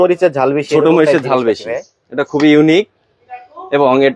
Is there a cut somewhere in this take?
no; 0 cuts

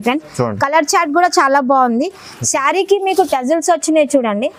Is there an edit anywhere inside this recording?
no; 0 cuts

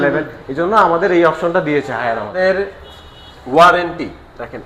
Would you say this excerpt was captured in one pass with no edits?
no; 1 cut; at 2.3 s

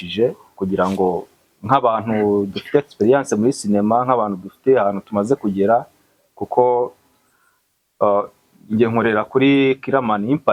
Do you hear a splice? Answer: no; 0 cuts

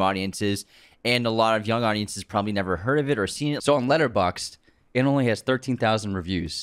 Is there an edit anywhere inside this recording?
yes; 1 cut; at 3.6 s

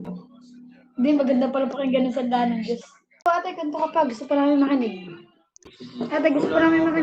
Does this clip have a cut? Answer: yes; 1 cut; at 3.3 s

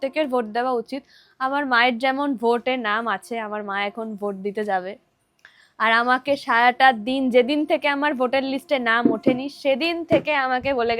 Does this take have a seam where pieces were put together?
no; 0 cuts

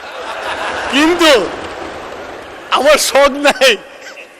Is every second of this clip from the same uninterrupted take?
yes; 0 cuts

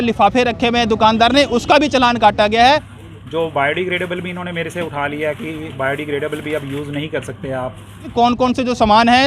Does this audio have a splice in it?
yes; 2 cuts; at 2.9 s, 8.1 s

